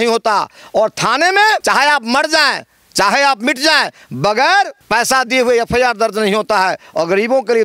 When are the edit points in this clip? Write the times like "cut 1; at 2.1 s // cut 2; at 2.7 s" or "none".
cut 1; at 1.6 s // cut 2; at 4.8 s